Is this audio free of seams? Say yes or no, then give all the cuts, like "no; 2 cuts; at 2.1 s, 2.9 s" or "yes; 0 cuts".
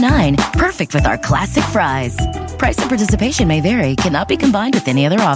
yes; 0 cuts